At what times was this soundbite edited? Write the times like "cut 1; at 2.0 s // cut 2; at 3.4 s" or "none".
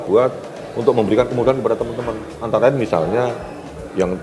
none